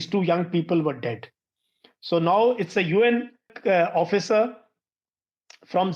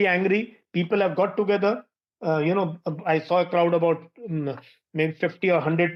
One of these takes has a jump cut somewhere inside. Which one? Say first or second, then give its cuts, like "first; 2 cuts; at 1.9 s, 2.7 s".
first; 1 cut; at 3.5 s